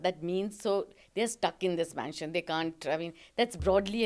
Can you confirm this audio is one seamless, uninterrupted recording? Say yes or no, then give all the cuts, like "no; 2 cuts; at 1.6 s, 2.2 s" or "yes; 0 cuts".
yes; 0 cuts